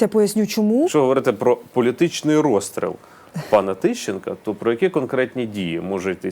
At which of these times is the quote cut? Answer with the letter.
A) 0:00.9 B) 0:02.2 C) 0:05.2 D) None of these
A